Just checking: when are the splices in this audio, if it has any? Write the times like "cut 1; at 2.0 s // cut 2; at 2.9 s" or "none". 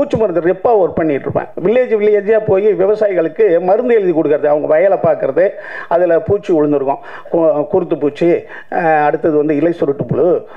cut 1; at 1.5 s